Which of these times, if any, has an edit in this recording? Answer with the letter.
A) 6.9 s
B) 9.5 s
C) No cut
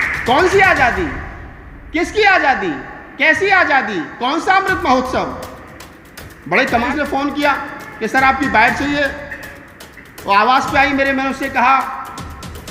A